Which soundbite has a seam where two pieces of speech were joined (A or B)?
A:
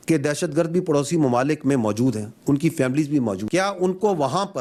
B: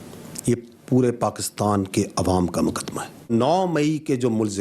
B